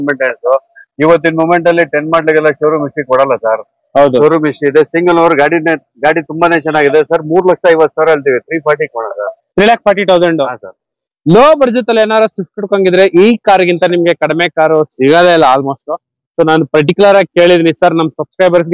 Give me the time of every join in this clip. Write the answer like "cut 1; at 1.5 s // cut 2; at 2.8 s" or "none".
cut 1; at 10.9 s